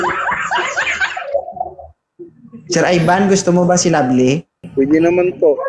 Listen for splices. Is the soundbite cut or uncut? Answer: cut